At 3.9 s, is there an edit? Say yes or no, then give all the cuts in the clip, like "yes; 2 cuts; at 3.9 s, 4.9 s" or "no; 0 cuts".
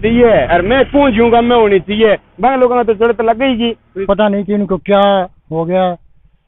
yes; 1 cut; at 3.9 s